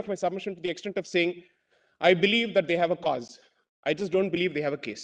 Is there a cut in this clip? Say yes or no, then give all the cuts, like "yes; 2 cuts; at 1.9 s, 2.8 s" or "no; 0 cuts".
no; 0 cuts